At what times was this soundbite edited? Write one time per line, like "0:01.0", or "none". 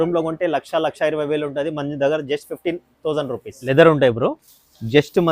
0:03.5